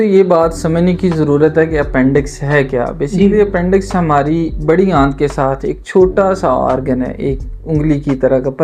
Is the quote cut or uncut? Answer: uncut